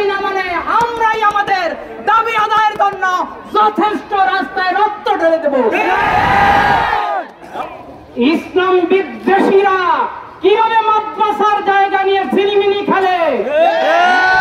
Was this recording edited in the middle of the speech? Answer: yes; 1 cut; at 7.6 s

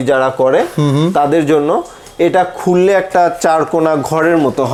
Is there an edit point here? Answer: no; 0 cuts

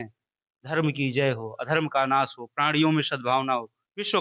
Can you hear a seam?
no; 0 cuts

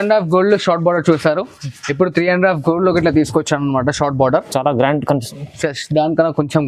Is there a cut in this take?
no; 0 cuts

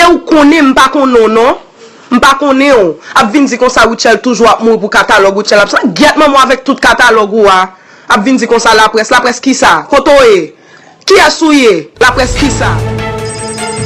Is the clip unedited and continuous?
no; 1 cut; at 12.6 s

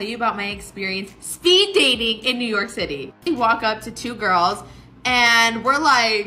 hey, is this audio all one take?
no; 1 cut; at 3.2 s

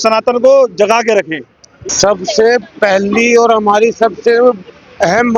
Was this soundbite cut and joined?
yes; 1 cut; at 1.8 s

